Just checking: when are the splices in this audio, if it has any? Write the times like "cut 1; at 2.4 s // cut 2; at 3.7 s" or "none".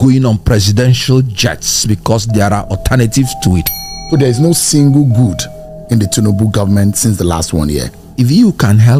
cut 1; at 3.9 s